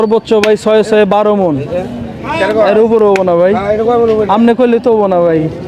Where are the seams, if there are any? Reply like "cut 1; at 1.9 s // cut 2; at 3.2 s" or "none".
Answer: none